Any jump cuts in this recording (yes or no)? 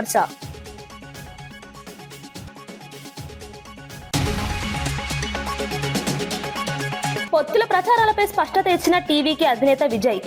no